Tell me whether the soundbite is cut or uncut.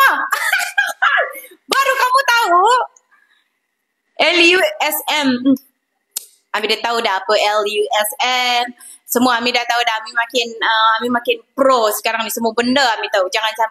uncut